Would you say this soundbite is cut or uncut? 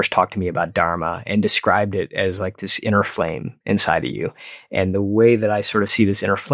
uncut